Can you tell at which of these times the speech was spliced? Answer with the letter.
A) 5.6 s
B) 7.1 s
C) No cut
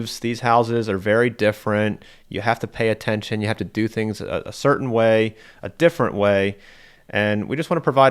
B